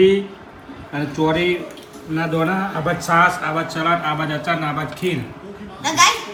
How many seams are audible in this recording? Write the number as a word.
zero